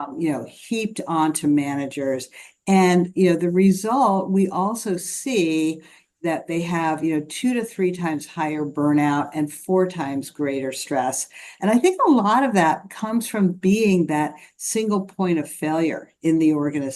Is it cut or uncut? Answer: uncut